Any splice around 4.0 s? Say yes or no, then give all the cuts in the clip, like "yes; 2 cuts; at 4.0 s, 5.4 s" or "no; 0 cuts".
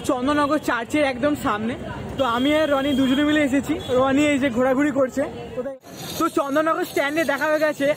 no; 1 cut; at 5.5 s